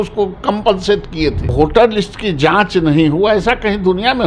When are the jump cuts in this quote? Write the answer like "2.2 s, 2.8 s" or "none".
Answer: 1.4 s